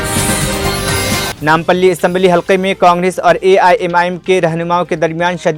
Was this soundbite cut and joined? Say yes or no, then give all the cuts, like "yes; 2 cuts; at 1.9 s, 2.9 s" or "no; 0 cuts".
no; 0 cuts